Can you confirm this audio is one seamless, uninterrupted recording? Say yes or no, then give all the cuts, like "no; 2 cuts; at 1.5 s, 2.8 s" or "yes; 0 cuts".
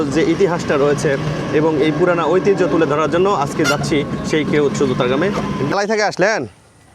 no; 1 cut; at 5.7 s